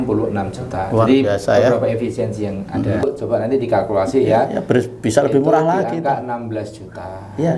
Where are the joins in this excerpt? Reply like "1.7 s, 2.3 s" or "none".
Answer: 3.0 s